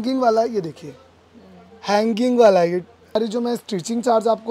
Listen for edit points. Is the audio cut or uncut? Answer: cut